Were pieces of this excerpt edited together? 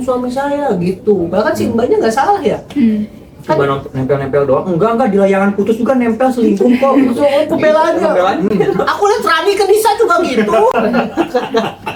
no; 0 cuts

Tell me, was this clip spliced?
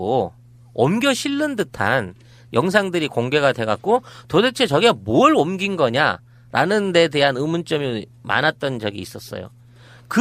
yes; 1 cut; at 1.5 s

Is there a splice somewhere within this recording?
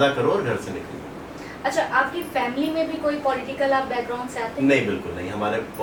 no; 0 cuts

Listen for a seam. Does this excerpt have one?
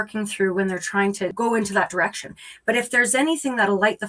yes; 1 cut; at 1.3 s

